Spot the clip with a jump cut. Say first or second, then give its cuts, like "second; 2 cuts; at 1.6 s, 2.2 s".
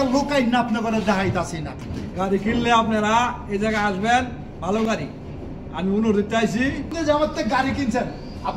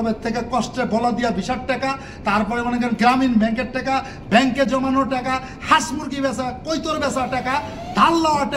first; 2 cuts; at 1.7 s, 6.9 s